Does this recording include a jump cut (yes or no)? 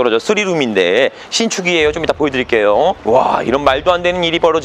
no